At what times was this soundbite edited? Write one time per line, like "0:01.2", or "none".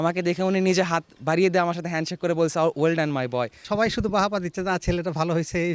0:03.6